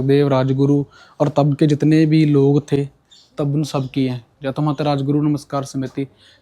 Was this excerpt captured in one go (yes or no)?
yes